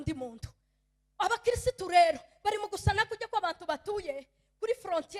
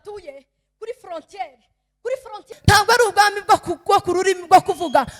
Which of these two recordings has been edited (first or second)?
second